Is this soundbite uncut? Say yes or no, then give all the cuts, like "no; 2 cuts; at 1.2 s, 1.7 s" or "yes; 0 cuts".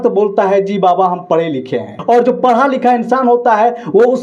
no; 1 cut; at 1.9 s